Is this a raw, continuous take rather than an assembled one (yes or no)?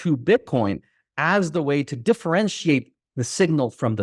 yes